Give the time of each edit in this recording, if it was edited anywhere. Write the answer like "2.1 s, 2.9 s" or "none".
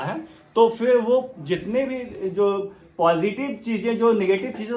none